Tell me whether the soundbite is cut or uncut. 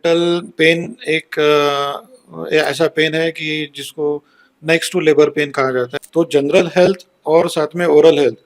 cut